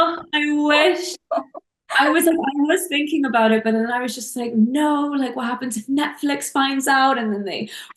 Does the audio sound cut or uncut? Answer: uncut